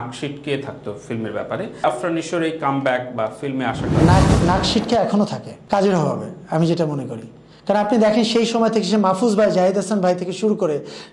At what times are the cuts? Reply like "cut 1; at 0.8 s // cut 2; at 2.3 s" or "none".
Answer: none